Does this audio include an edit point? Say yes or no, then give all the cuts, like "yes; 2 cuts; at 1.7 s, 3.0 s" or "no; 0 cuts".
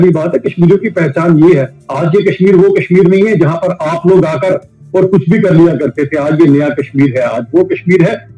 yes; 1 cut; at 1.8 s